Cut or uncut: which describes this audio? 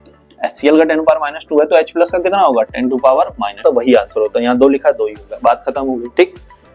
cut